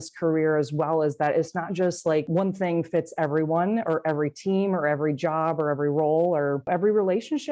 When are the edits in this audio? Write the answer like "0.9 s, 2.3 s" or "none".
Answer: 2.3 s, 6.7 s